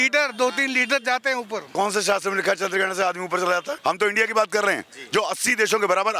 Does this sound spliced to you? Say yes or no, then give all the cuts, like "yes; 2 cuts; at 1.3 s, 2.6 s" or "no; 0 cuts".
yes; 2 cuts; at 1.7 s, 3.7 s